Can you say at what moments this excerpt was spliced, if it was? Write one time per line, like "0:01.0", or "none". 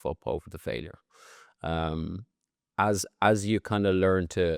none